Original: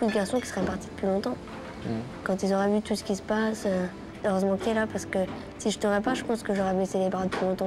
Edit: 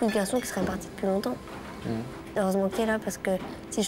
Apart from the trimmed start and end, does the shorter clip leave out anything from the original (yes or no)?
yes